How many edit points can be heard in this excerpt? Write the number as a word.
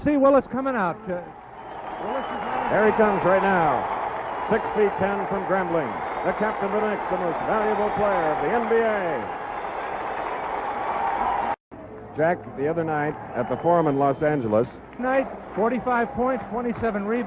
zero